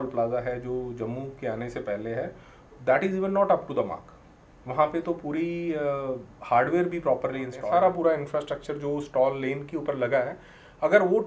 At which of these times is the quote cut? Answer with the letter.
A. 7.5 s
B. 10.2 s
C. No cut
A